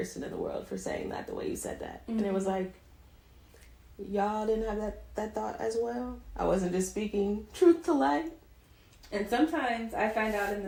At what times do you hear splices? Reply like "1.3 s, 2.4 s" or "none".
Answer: none